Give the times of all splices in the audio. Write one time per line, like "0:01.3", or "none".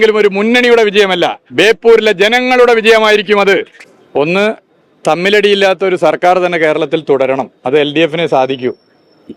0:03.8

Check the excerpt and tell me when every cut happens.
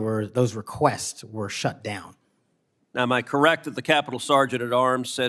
none

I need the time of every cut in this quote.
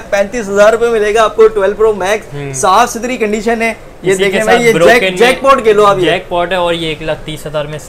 none

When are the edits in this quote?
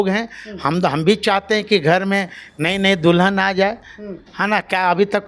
none

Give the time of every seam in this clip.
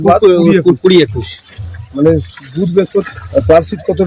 0:03.0

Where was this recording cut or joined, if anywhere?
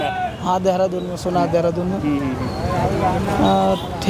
none

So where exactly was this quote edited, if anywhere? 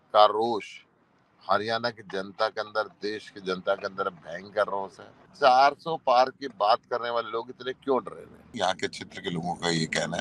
0:05.3
0:08.5

